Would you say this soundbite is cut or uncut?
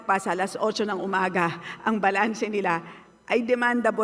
uncut